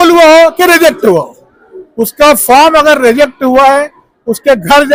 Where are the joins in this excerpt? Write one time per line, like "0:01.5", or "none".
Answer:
none